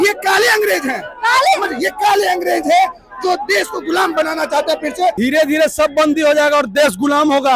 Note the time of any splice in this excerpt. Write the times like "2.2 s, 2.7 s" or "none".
5.2 s